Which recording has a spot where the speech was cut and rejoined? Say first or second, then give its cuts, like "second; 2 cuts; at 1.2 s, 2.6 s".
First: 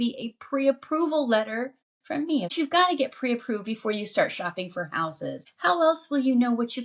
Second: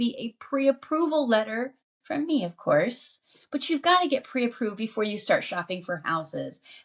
first; 2 cuts; at 2.5 s, 5.5 s